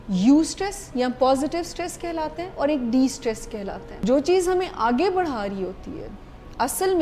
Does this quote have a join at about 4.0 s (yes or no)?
yes